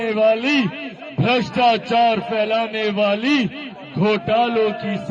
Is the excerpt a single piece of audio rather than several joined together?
yes; 0 cuts

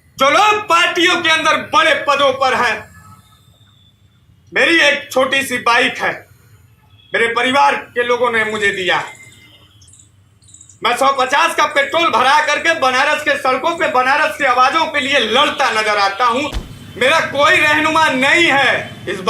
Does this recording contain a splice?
yes; 1 cut; at 16.7 s

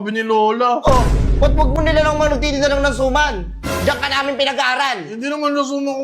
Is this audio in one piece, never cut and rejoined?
yes; 0 cuts

